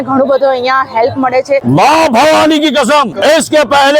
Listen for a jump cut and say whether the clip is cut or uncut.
cut